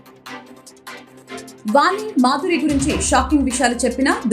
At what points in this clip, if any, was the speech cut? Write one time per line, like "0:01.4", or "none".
0:01.5